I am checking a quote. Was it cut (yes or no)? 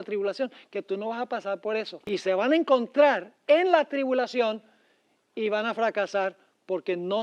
yes